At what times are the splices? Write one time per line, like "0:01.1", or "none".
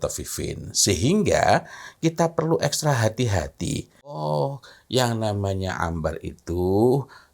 0:04.2